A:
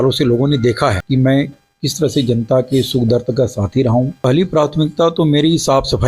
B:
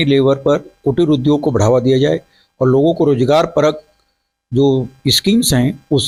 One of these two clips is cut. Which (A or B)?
A